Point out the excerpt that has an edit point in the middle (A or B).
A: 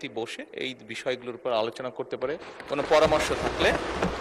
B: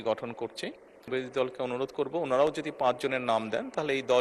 B